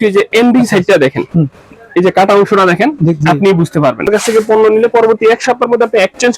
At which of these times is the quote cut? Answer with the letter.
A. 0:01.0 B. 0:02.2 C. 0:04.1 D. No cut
C